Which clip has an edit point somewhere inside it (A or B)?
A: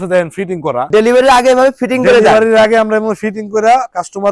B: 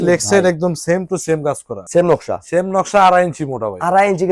B